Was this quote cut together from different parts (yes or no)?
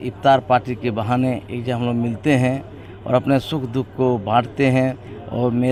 no